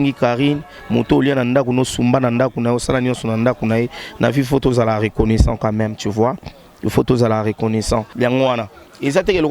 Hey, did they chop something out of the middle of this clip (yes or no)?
yes